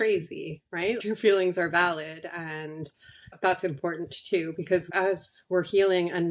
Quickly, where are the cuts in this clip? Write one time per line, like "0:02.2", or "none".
0:01.0
0:04.9